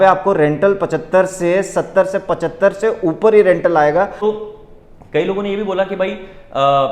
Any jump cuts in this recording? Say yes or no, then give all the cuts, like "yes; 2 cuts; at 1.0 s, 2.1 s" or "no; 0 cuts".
yes; 1 cut; at 4.2 s